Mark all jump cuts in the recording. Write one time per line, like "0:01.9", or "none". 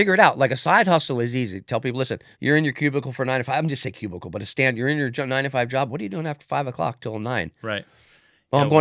0:02.3